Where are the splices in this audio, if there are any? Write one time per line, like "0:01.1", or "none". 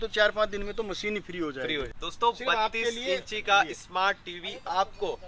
0:02.0

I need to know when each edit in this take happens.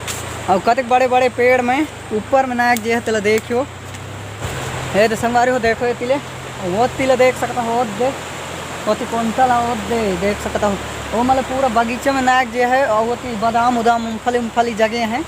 0:04.4

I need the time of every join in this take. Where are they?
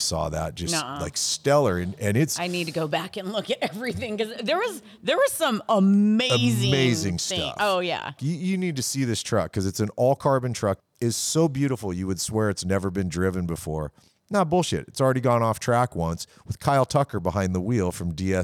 0:08.2
0:10.8

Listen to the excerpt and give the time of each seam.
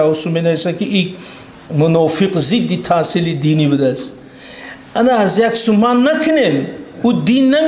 none

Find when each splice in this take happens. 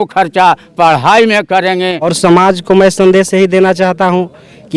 0:02.1

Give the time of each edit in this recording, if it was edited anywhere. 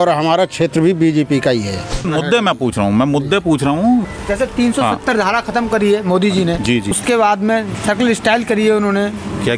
0:02.1
0:04.1
0:07.0

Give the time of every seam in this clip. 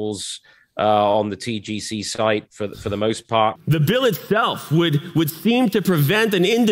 0:03.6

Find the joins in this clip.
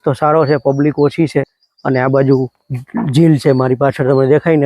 0:01.5

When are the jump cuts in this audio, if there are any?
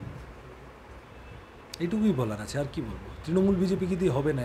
none

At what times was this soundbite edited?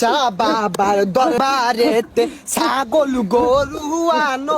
0:01.4

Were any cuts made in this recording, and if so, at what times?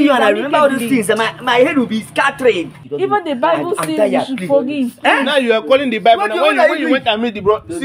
0:02.8

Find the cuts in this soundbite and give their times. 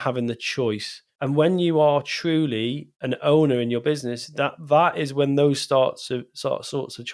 none

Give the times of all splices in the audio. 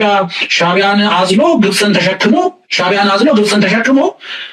none

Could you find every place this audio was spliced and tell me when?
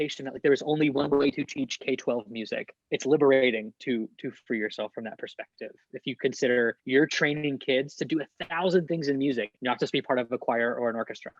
0:02.8
0:06.8
0:09.5

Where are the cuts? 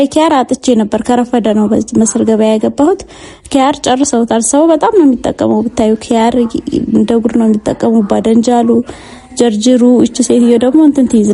none

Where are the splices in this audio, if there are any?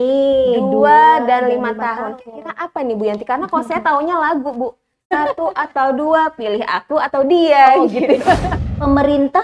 0:08.5

